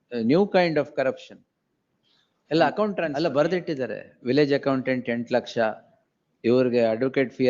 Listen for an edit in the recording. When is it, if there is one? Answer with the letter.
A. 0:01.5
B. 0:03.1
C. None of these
B